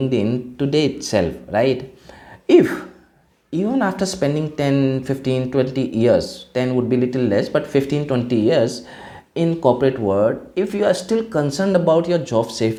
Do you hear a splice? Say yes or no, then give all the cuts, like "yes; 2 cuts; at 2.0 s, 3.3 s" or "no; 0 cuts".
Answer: no; 0 cuts